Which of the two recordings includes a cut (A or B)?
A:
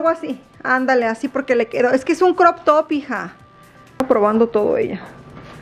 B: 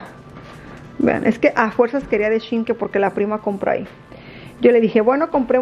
A